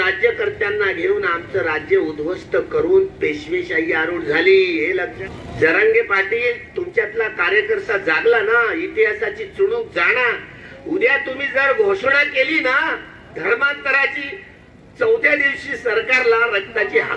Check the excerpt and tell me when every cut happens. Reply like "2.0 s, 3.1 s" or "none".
5.1 s